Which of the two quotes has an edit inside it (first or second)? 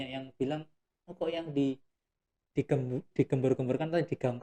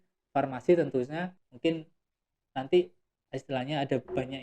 second